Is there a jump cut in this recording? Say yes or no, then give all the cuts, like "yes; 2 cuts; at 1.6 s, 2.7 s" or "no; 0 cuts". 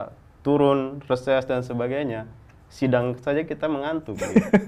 no; 0 cuts